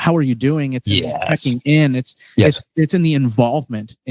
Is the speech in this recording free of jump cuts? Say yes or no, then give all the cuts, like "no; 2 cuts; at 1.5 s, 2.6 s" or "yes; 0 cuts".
yes; 0 cuts